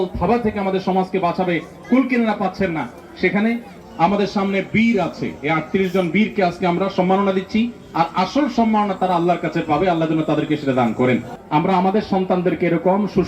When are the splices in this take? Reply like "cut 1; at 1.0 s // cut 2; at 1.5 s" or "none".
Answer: cut 1; at 3.7 s // cut 2; at 11.3 s